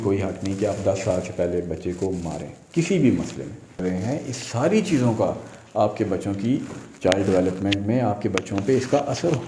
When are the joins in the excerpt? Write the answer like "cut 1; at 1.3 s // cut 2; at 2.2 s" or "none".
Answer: cut 1; at 3.8 s